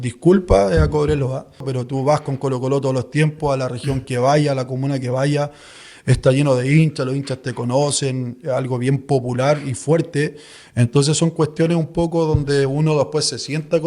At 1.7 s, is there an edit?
yes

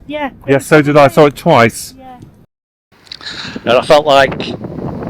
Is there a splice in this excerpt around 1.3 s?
no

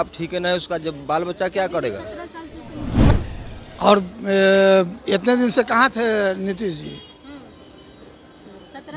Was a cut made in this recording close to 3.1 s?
yes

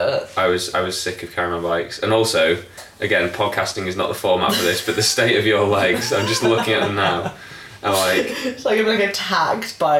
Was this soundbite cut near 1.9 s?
no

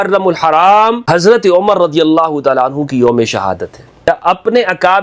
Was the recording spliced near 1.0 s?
yes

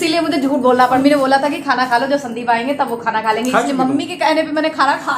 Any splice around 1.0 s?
yes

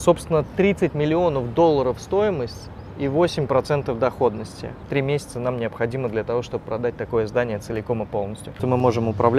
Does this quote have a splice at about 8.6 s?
yes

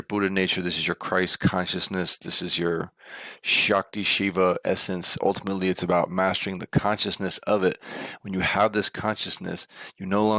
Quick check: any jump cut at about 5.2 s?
yes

